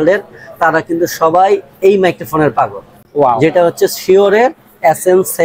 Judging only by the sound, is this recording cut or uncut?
uncut